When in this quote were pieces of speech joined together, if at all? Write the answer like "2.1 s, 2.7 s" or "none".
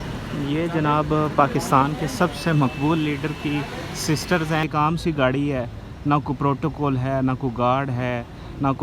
4.6 s